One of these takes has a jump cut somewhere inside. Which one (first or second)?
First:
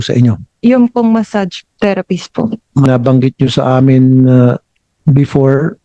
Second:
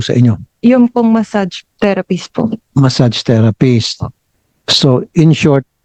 first